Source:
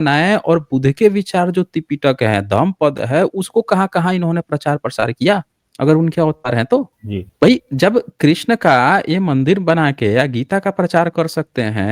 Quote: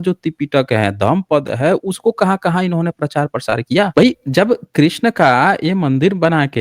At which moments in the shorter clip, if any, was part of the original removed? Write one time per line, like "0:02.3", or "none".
0:03.9